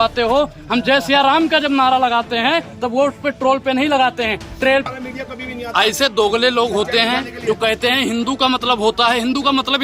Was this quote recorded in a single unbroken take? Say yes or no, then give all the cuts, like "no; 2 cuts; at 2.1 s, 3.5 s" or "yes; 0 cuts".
no; 1 cut; at 4.9 s